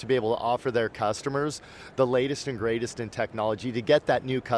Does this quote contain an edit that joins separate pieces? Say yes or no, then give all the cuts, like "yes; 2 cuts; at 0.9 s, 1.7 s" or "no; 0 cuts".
no; 0 cuts